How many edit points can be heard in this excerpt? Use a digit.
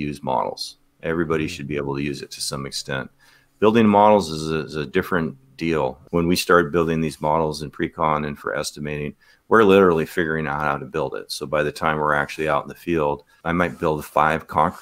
2